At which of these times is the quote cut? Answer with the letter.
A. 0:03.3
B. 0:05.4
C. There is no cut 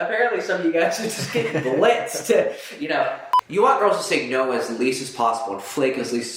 A